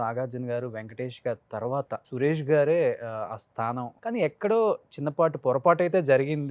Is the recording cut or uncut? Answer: cut